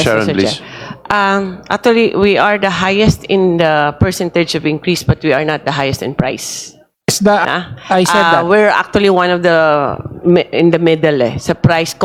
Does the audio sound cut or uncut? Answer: uncut